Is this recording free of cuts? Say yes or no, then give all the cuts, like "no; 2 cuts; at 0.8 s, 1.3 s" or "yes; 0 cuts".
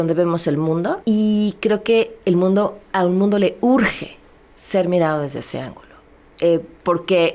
no; 1 cut; at 1.0 s